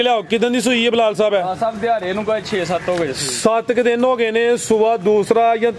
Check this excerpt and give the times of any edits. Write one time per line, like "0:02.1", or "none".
none